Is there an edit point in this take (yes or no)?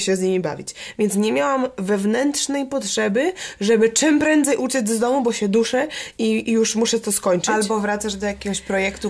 no